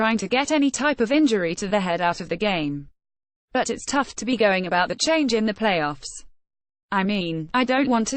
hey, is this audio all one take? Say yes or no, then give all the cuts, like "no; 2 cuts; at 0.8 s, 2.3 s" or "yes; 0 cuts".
no; 1 cut; at 4.1 s